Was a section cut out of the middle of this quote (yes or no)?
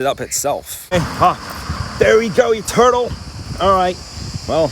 yes